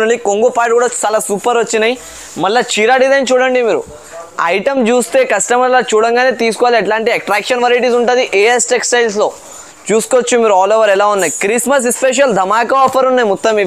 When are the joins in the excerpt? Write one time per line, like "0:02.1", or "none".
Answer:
none